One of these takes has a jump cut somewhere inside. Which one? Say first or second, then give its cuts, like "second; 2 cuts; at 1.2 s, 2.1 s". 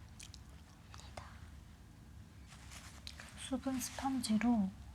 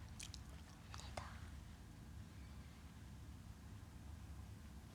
first; 1 cut; at 2.5 s